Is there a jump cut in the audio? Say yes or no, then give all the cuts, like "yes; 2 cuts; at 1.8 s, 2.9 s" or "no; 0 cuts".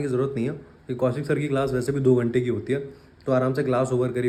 no; 0 cuts